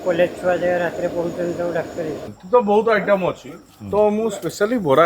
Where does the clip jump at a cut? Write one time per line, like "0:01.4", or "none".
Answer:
0:02.3